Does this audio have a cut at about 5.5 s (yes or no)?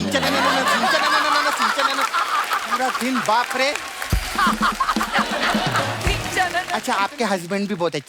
no